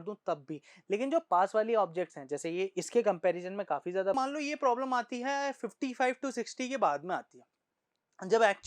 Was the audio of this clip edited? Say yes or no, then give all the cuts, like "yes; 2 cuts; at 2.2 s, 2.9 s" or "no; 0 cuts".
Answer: yes; 1 cut; at 4.1 s